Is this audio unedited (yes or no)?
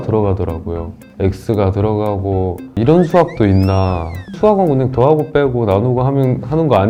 yes